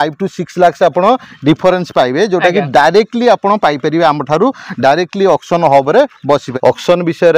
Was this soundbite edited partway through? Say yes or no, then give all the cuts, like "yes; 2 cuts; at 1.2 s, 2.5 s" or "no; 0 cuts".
yes; 1 cut; at 6.5 s